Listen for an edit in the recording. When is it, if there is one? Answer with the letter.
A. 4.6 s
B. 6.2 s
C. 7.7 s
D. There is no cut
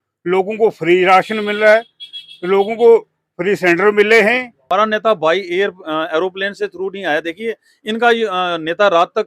A